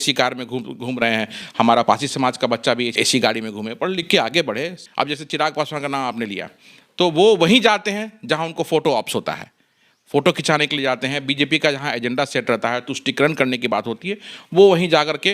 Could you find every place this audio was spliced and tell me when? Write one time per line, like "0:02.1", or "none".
0:03.0
0:04.8